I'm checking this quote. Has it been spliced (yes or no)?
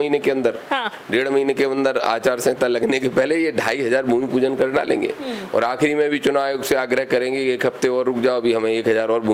no